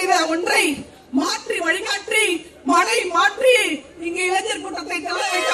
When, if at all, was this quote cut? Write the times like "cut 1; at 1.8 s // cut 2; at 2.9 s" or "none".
none

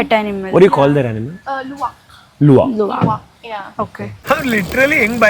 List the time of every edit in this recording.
cut 1; at 4.1 s

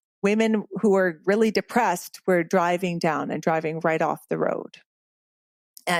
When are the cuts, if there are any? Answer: none

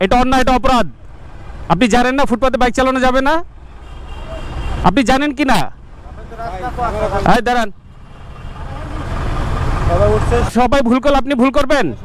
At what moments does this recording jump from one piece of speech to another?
none

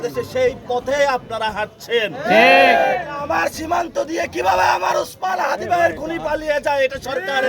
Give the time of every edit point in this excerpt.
cut 1; at 3.2 s

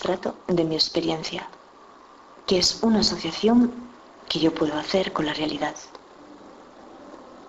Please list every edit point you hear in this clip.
cut 1; at 4.2 s

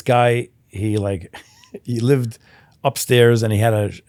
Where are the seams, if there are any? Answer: none

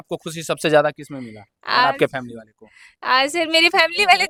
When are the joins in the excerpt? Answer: none

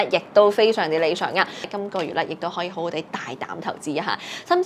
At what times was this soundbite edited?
cut 1; at 1.7 s

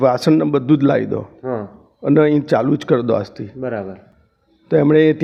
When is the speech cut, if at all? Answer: none

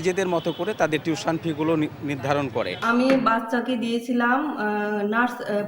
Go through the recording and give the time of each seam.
cut 1; at 2.8 s

